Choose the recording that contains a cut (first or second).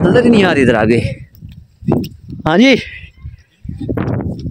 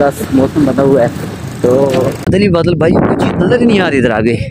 second